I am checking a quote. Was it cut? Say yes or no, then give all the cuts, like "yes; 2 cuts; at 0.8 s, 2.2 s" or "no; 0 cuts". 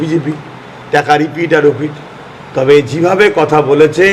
no; 0 cuts